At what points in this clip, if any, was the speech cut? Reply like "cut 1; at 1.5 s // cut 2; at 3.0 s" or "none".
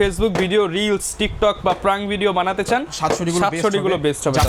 none